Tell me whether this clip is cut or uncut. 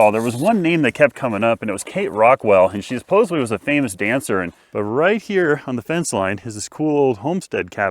cut